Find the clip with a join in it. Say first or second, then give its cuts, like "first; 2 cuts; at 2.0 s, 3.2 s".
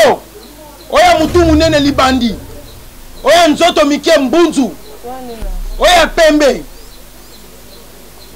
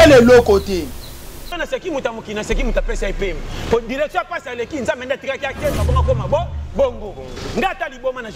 second; 1 cut; at 1.5 s